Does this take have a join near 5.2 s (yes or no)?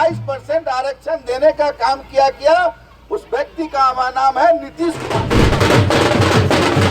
yes